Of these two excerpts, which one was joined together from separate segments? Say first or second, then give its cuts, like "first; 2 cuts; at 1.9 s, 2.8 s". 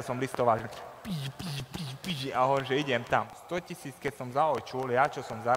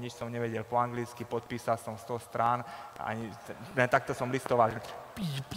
first; 1 cut; at 3.4 s